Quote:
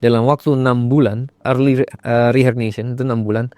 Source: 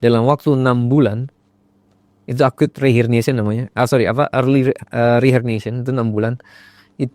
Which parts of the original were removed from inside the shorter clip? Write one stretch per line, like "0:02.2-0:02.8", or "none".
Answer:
0:01.4-0:04.3